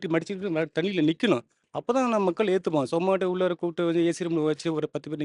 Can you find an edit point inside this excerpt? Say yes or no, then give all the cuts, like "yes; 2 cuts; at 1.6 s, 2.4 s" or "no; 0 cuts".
no; 0 cuts